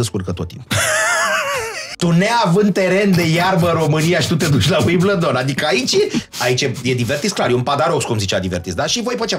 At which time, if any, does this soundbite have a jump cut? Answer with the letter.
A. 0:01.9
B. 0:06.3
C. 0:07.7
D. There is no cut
A